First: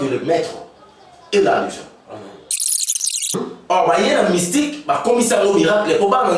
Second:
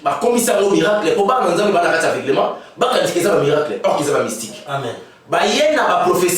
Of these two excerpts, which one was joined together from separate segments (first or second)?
first